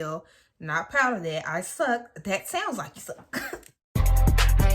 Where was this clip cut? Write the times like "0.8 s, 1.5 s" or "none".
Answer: 3.8 s